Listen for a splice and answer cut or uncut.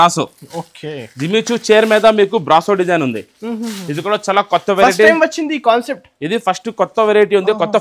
uncut